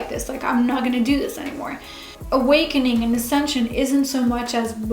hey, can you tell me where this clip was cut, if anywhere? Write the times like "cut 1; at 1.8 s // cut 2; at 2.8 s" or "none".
cut 1; at 2.2 s

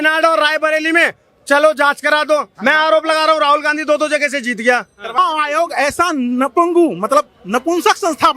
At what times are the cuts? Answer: cut 1; at 5.2 s

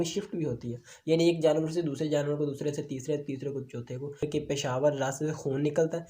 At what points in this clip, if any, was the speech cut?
cut 1; at 4.2 s

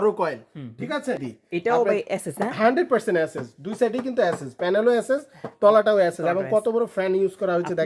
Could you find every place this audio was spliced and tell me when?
cut 1; at 1.3 s

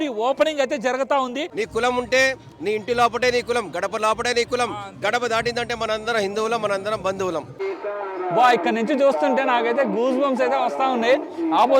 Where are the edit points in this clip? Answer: cut 1; at 1.5 s // cut 2; at 7.5 s

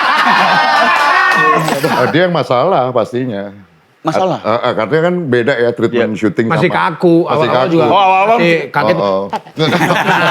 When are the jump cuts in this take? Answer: cut 1; at 2.0 s

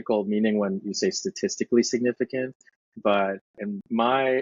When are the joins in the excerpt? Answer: cut 1; at 3.5 s

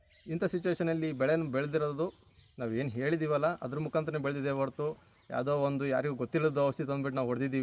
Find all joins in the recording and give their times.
none

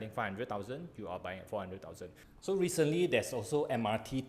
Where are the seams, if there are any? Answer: cut 1; at 2.2 s

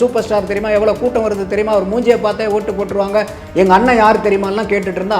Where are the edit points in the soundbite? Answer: none

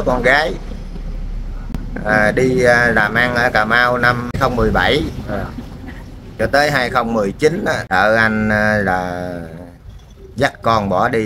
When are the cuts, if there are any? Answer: cut 1; at 4.3 s // cut 2; at 7.9 s

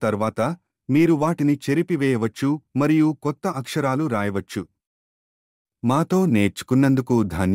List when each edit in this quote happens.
cut 1; at 5.2 s

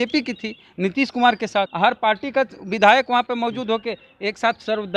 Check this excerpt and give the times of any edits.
cut 1; at 1.7 s

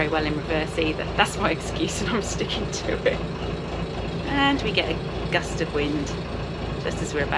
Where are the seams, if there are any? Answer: none

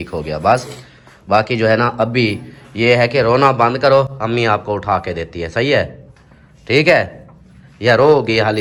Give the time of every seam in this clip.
none

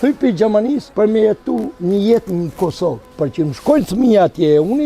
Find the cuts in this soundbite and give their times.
cut 1; at 0.9 s // cut 2; at 1.7 s // cut 3; at 3.1 s

